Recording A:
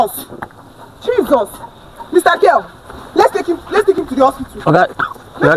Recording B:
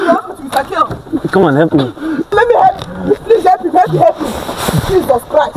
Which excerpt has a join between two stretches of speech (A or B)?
B